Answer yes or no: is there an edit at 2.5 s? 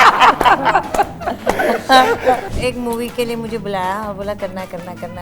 yes